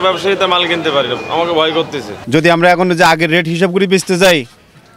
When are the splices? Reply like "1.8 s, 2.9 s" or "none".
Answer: 2.1 s

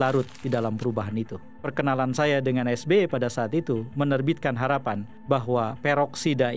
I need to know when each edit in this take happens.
1.6 s

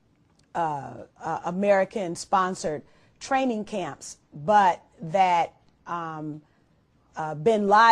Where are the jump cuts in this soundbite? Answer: 5.8 s

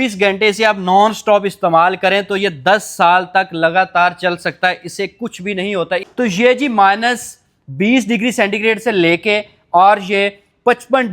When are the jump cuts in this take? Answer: 6.0 s

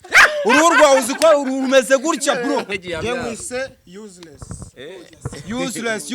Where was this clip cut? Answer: 2.7 s

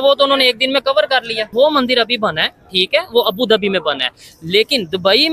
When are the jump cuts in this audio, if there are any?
1.5 s

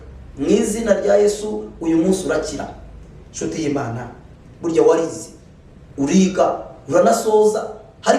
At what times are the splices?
2.9 s

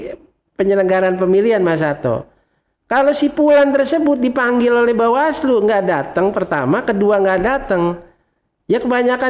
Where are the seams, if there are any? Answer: none

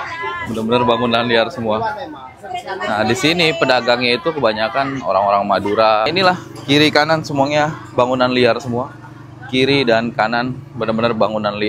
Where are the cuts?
6.1 s

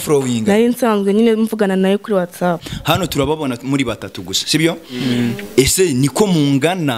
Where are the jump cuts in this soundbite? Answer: 2.7 s

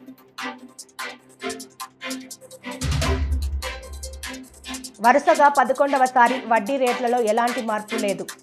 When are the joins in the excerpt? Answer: 4.9 s

